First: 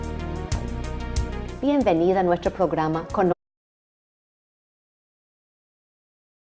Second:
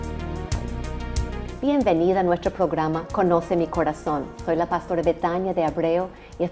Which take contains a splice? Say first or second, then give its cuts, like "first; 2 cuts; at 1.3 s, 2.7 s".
second; 1 cut; at 3.3 s